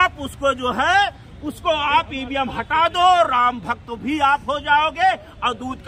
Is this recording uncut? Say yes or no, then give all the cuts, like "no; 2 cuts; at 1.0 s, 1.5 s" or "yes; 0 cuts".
yes; 0 cuts